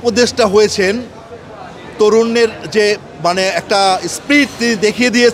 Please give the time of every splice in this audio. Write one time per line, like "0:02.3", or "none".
none

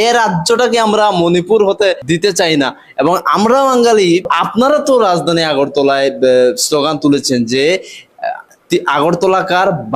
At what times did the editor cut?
0:02.0
0:04.3

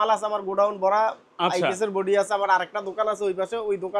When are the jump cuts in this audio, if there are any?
none

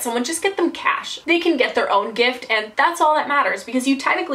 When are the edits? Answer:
0:01.2

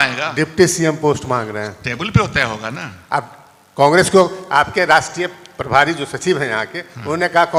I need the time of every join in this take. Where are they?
none

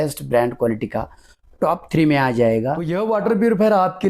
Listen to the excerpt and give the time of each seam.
0:02.9

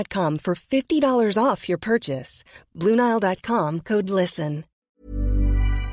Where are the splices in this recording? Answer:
0:04.7

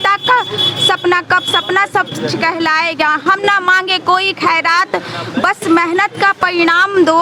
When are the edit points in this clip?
none

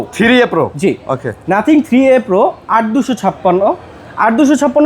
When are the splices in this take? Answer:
none

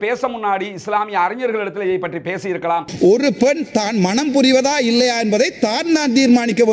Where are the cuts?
0:02.9

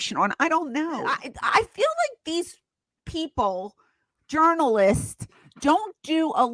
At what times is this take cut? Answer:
0:01.3

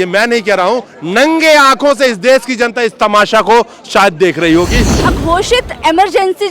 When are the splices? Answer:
0:04.9

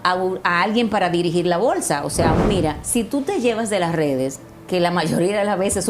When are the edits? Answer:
0:02.4

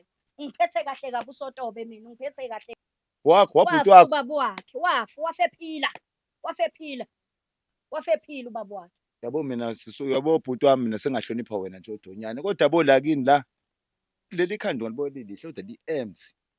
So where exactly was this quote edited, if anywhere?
0:02.7

